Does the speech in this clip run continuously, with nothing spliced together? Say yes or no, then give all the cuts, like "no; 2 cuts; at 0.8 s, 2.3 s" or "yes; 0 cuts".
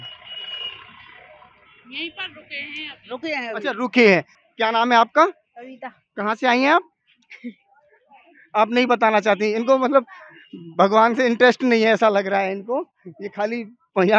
no; 1 cut; at 4.3 s